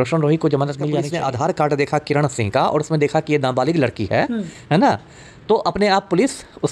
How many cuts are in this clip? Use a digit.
1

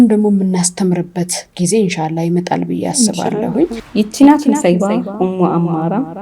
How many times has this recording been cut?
1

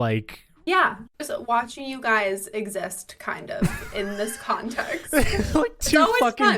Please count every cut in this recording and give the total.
1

